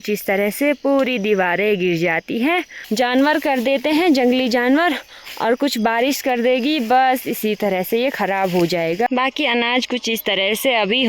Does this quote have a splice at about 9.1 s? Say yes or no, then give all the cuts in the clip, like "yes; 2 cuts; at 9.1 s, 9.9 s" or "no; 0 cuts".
yes; 2 cuts; at 2.8 s, 9.1 s